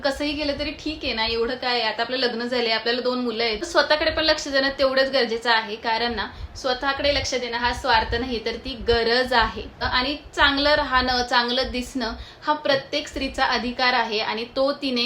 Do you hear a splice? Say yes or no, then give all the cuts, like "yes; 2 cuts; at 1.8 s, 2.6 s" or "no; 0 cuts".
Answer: yes; 2 cuts; at 3.7 s, 9.8 s